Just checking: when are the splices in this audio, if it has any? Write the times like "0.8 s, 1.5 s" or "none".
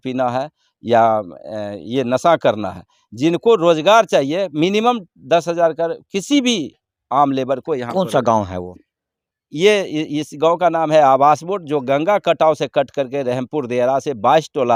none